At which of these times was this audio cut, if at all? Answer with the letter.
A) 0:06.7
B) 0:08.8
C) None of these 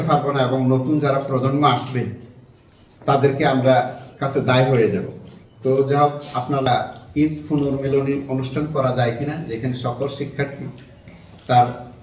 A